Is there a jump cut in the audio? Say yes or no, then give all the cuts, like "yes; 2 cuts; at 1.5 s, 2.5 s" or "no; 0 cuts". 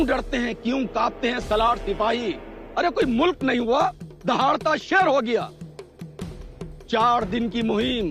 no; 0 cuts